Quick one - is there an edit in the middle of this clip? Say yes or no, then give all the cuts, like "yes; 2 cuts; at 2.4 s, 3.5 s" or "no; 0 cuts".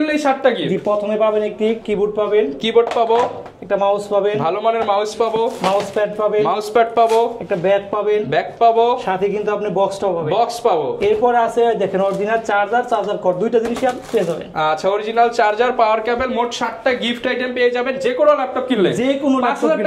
no; 0 cuts